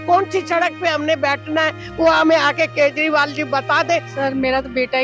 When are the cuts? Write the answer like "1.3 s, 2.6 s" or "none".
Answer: 4.1 s